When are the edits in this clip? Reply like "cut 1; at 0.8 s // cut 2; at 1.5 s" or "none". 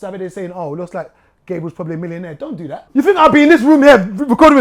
cut 1; at 2.8 s